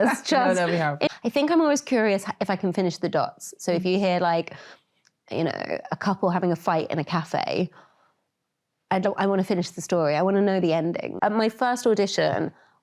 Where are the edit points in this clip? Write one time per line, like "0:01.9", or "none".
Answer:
0:01.1
0:11.1